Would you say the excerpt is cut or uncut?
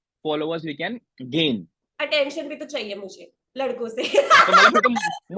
cut